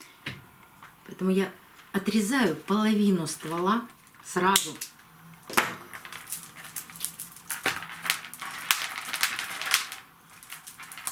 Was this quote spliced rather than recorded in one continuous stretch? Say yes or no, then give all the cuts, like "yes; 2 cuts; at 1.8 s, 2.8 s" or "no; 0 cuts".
no; 0 cuts